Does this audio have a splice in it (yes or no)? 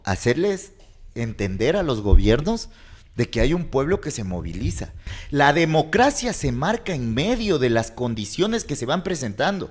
yes